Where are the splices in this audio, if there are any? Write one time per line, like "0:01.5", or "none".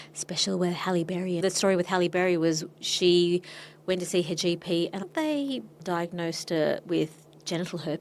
0:01.4
0:05.1